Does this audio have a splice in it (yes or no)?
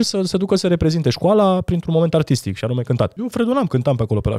yes